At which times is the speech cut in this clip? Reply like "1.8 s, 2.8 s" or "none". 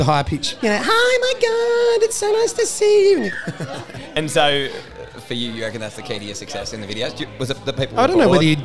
3.3 s

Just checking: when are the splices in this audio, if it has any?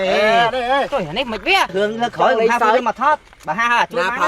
1.7 s

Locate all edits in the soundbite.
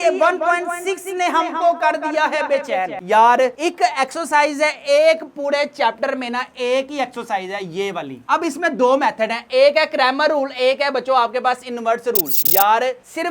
none

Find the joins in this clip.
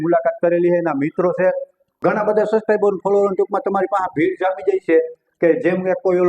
1.8 s

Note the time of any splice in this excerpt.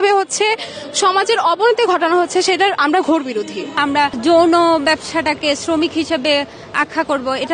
3.8 s

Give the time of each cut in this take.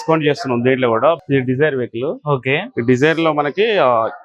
1.2 s

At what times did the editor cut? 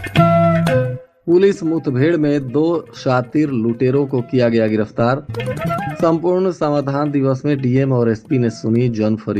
1.0 s

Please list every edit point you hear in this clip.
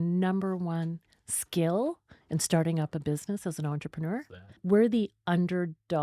4.6 s

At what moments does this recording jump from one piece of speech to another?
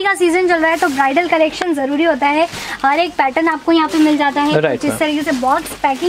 none

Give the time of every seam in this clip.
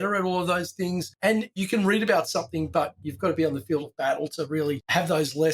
1.5 s, 3.0 s

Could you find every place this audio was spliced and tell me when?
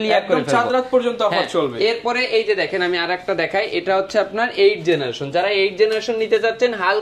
none

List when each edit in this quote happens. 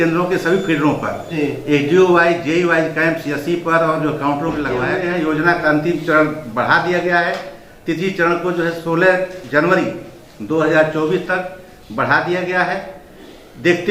4.9 s

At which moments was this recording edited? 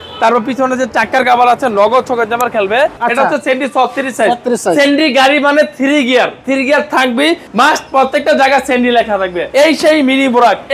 3.0 s, 7.5 s, 9.5 s

